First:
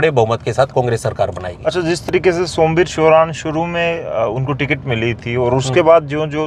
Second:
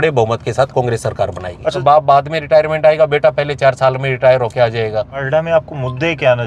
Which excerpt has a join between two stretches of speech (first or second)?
second